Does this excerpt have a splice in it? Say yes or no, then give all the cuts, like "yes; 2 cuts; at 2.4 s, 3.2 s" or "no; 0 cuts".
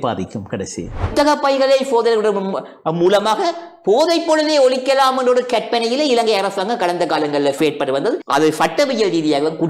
yes; 2 cuts; at 1.0 s, 7.6 s